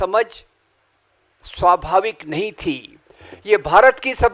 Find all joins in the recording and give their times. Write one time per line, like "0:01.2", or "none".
none